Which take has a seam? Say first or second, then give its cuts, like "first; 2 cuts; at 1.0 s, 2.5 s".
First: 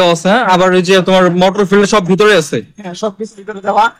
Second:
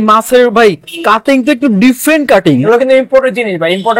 second; 1 cut; at 2.6 s